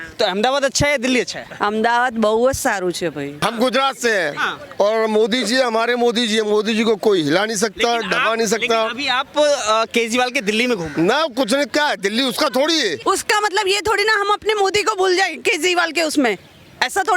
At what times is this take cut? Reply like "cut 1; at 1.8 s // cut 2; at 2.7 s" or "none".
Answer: cut 1; at 1.4 s // cut 2; at 3.3 s // cut 3; at 13.0 s